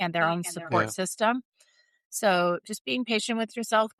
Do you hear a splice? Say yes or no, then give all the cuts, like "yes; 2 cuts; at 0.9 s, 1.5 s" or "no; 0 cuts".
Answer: no; 0 cuts